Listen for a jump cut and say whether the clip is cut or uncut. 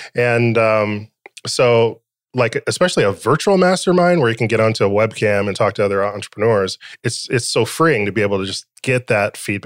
uncut